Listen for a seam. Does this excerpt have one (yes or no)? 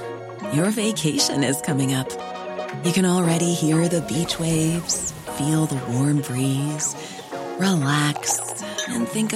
no